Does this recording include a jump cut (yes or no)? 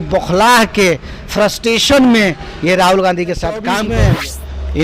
yes